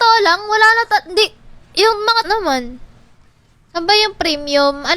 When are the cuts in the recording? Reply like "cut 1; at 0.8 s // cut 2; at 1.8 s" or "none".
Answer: cut 1; at 2.3 s